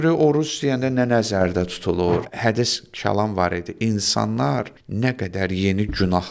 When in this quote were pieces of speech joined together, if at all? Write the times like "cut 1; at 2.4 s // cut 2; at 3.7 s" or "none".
cut 1; at 2.3 s // cut 2; at 4.8 s